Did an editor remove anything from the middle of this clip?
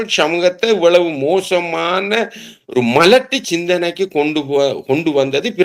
no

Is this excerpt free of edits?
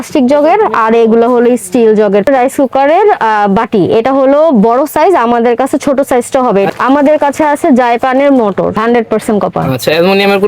no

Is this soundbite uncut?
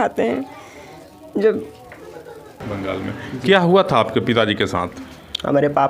no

